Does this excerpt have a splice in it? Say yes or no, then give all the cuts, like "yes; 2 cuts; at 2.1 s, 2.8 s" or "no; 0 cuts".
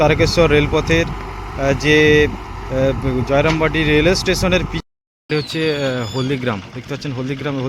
yes; 1 cut; at 4.7 s